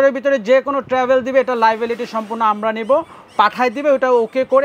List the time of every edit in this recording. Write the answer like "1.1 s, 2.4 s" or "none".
none